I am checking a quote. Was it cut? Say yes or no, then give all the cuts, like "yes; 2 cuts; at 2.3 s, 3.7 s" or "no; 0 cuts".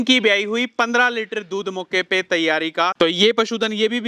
yes; 1 cut; at 2.9 s